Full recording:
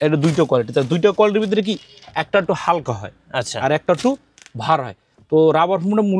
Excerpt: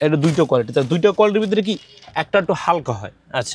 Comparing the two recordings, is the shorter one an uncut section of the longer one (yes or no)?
yes